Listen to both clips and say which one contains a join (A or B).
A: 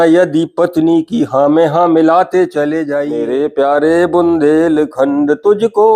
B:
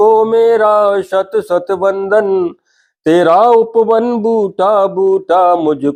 A